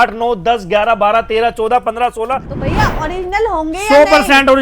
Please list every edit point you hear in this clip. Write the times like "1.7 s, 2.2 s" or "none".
2.5 s